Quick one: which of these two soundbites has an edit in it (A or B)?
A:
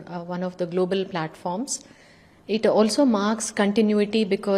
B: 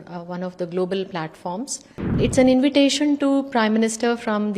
B